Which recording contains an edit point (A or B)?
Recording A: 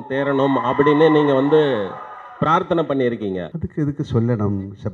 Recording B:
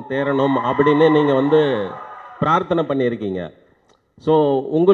A